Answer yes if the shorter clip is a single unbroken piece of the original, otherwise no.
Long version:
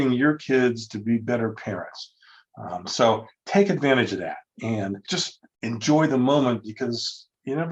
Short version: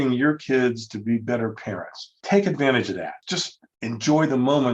no